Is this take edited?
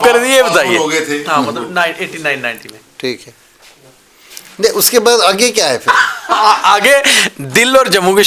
no; 0 cuts

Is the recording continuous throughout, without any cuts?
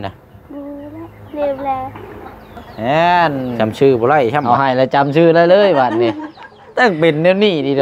no; 3 cuts; at 2.6 s, 3.5 s, 4.4 s

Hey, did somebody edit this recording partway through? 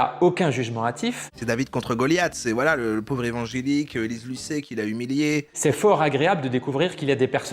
yes; 2 cuts; at 1.3 s, 5.5 s

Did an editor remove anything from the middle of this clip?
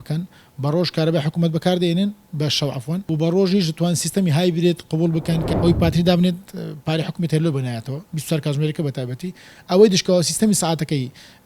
yes; 2 cuts; at 3.0 s, 5.5 s

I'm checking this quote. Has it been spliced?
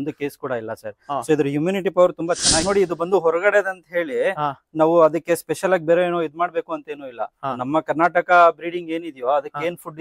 yes; 1 cut; at 2.6 s

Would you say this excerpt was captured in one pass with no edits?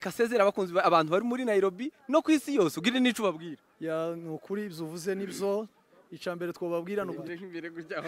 no; 1 cut; at 7.2 s

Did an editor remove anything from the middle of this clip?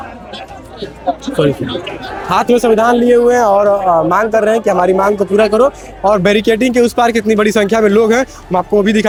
no; 0 cuts

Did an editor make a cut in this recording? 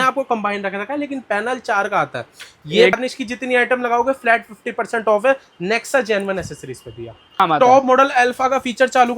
yes; 2 cuts; at 2.9 s, 7.4 s

